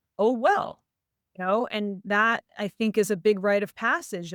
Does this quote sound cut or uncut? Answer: uncut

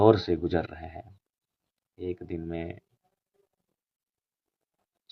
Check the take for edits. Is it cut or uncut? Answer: uncut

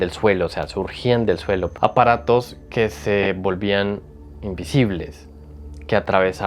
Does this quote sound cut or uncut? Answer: cut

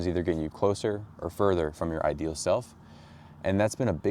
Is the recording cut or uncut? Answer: uncut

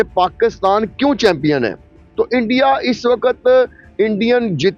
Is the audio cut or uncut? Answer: uncut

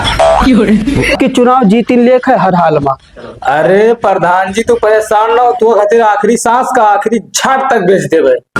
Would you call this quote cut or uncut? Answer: cut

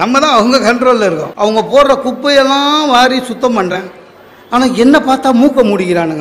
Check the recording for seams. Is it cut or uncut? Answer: cut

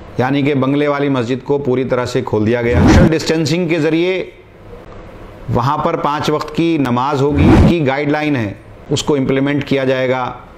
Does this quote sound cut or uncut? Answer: cut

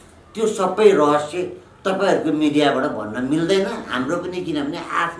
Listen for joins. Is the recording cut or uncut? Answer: uncut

